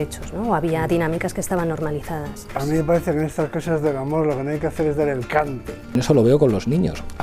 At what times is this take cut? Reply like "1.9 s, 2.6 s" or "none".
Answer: 2.5 s, 5.9 s